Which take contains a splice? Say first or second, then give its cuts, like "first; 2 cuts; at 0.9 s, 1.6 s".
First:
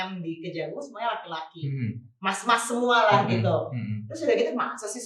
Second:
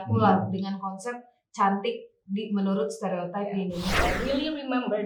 second; 1 cut; at 3.9 s